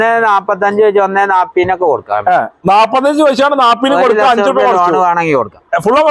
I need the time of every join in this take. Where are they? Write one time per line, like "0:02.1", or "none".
none